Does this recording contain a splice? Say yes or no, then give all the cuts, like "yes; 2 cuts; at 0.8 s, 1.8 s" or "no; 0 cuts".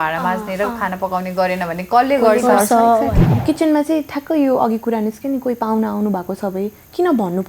yes; 1 cut; at 3.2 s